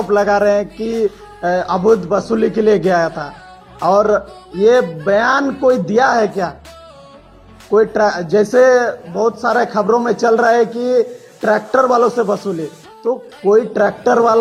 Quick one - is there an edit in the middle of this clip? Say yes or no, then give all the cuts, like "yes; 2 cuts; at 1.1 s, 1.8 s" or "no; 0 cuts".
no; 0 cuts